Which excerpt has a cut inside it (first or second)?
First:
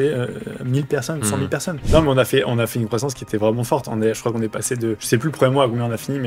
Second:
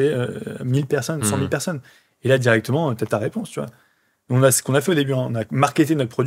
first